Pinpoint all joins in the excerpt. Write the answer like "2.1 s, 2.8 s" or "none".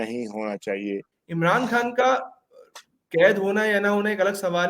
1.1 s

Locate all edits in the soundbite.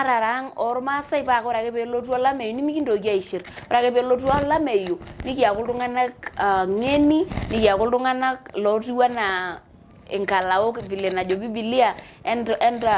none

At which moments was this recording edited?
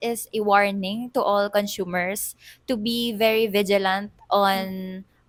none

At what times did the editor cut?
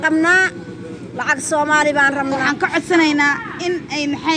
2.4 s

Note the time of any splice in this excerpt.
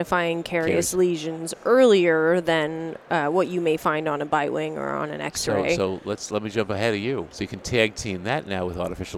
7.5 s

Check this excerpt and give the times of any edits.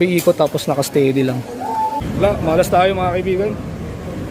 2.0 s

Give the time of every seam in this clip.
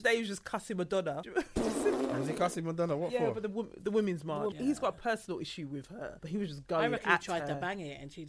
1.2 s, 4.5 s, 6.1 s

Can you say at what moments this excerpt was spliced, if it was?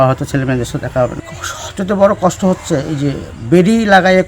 1.2 s

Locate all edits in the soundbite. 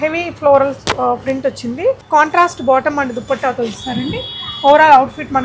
2.0 s

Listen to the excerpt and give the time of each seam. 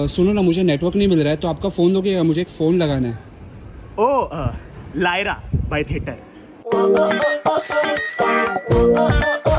none

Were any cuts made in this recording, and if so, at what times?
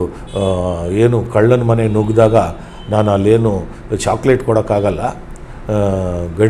none

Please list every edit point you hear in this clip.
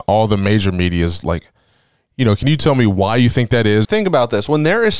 3.9 s

